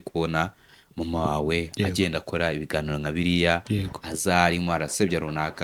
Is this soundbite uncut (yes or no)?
yes